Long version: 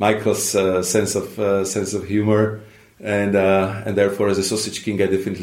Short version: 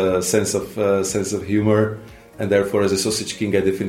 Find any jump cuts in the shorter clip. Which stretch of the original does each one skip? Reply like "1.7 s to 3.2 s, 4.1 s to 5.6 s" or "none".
2.9 s to 3.8 s

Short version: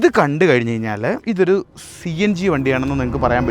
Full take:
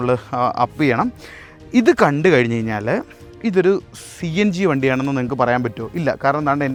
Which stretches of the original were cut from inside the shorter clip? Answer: 3.0 s to 3.4 s

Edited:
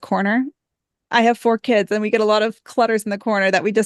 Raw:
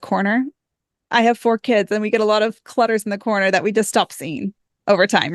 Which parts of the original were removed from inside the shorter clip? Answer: none

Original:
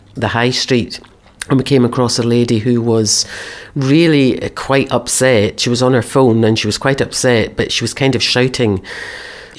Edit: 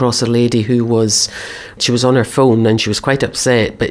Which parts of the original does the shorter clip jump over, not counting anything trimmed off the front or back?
3.7 s to 5.6 s

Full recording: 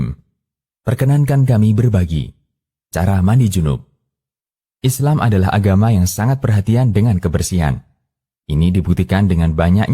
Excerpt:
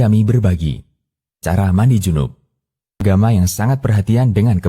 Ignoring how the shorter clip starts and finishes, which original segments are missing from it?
4.5 s to 5.6 s

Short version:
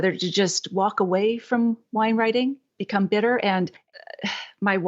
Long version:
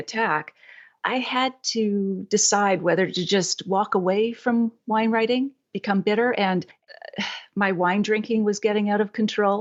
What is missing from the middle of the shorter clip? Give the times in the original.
none

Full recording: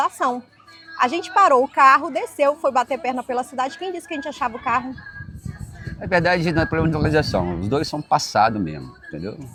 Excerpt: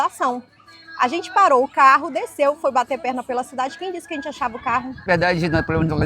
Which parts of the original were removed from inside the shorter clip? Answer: 5.0 s to 6.0 s

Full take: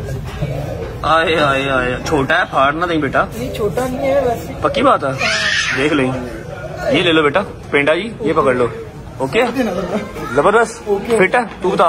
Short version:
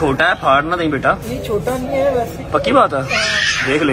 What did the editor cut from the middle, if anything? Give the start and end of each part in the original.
none

